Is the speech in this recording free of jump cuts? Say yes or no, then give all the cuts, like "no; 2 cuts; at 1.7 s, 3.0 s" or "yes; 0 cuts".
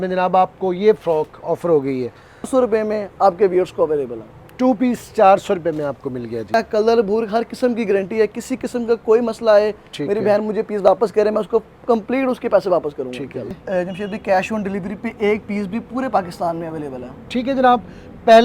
no; 3 cuts; at 2.5 s, 6.5 s, 13.6 s